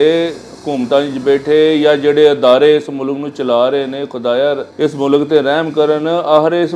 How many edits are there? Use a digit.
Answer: 1